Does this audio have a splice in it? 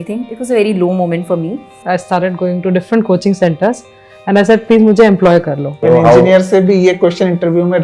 yes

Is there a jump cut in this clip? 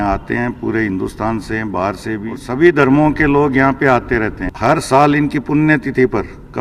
yes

